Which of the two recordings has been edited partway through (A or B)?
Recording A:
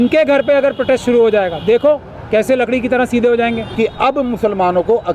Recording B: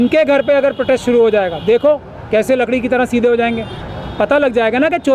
A